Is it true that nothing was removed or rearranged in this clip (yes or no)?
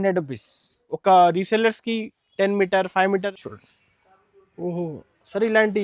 no